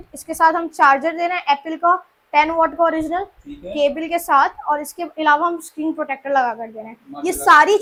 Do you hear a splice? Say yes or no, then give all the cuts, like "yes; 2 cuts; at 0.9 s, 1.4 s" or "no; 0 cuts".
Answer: no; 0 cuts